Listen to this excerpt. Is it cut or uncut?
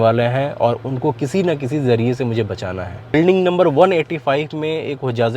cut